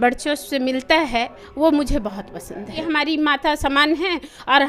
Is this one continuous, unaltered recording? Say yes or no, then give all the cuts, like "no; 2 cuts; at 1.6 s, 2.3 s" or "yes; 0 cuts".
no; 1 cut; at 2.7 s